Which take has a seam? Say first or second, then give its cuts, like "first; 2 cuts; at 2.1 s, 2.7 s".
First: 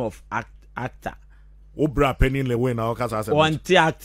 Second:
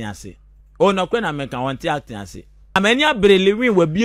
second; 1 cut; at 2.8 s